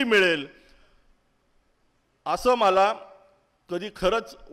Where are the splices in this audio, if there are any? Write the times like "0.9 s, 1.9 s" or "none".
none